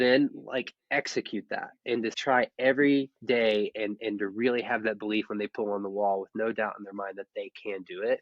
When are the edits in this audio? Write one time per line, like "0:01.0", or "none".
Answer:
0:02.2